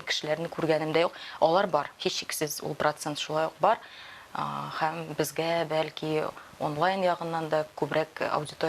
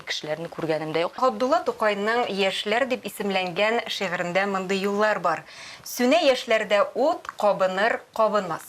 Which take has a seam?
second; 1 cut; at 1.2 s

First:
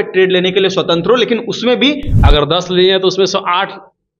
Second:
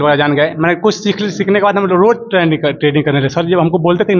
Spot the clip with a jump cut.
first; 1 cut; at 2.1 s

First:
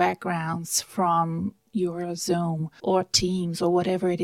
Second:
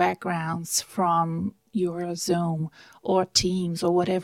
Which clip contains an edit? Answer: first; 1 cut; at 2.7 s

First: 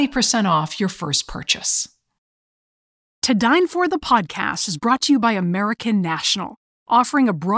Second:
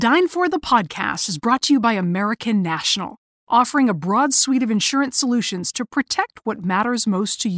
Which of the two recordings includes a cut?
first; 1 cut; at 2.4 s

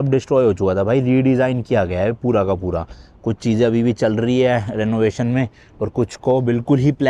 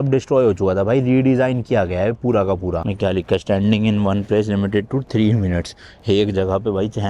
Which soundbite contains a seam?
second; 1 cut; at 2.9 s

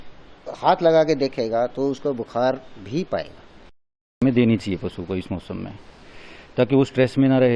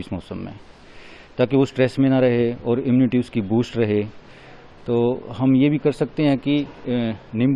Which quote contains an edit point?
first; 1 cut; at 4.2 s

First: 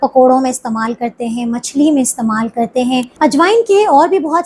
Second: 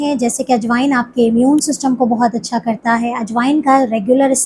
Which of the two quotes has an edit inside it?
first; 1 cut; at 3.1 s

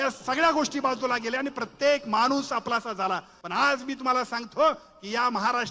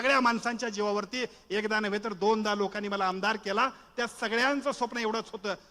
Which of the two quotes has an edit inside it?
first; 1 cut; at 3.4 s

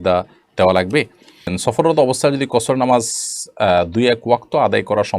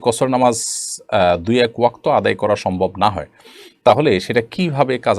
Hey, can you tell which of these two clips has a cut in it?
first; 1 cut; at 1.6 s

